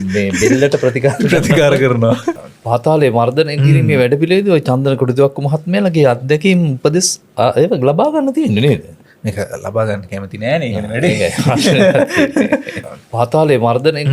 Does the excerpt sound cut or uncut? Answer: cut